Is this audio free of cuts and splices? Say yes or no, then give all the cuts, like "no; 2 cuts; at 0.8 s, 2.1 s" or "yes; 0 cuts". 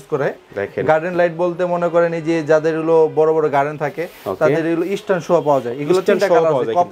yes; 0 cuts